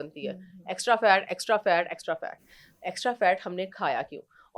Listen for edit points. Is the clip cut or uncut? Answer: uncut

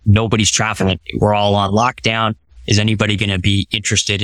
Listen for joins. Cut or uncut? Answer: cut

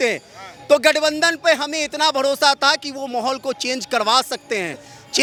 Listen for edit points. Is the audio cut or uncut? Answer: uncut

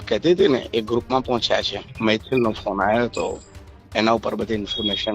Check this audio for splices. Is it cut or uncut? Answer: cut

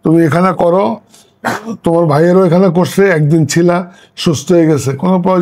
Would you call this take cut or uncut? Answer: uncut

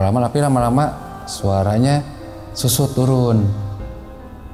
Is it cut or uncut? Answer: uncut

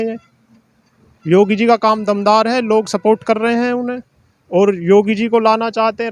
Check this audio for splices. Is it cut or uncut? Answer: uncut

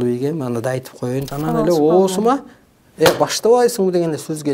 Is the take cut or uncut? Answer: cut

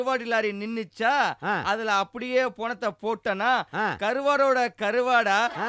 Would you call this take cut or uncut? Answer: uncut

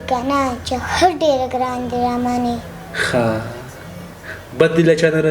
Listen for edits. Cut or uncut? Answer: uncut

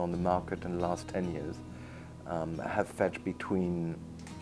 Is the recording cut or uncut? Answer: cut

